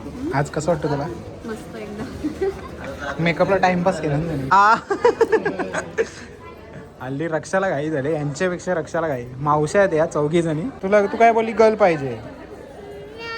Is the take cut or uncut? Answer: cut